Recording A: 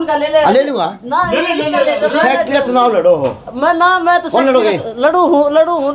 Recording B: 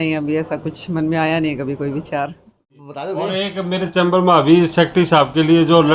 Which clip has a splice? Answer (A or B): B